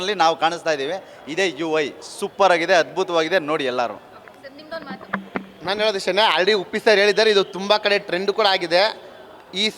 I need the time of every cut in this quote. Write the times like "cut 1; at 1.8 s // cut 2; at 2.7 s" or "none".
none